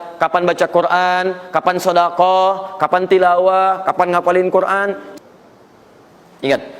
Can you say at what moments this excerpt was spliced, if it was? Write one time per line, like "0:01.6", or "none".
0:05.0

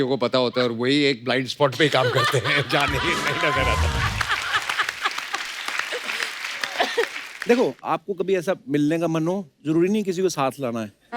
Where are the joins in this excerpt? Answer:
0:07.3

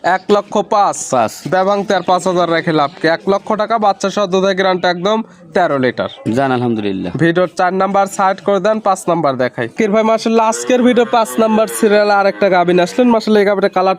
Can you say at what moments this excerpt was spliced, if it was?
none

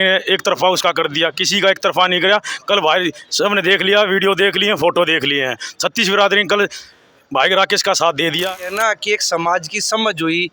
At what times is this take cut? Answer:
0:08.4

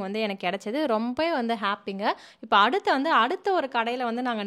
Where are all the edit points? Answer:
none

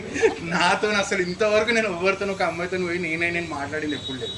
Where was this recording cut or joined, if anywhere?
none

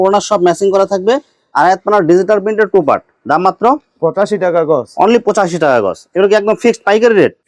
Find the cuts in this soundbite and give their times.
none

